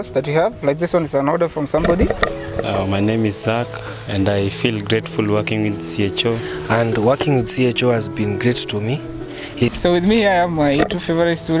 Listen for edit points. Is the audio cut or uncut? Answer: cut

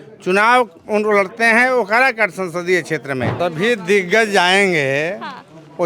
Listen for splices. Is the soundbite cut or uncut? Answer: cut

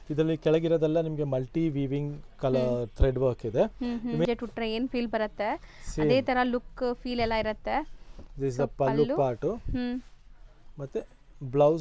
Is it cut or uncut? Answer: cut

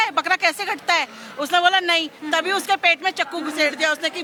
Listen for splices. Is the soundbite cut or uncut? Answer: uncut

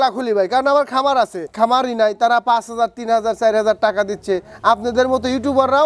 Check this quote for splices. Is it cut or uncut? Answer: cut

